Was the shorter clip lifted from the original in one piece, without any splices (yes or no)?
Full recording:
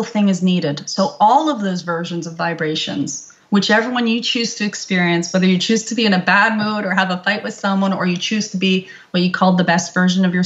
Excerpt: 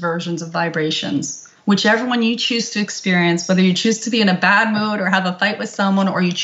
yes